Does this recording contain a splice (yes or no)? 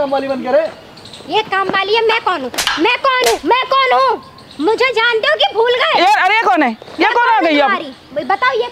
no